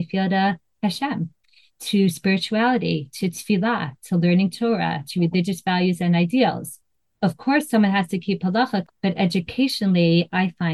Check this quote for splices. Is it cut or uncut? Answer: cut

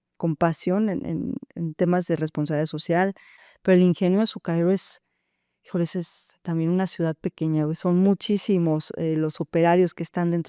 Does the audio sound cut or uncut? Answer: cut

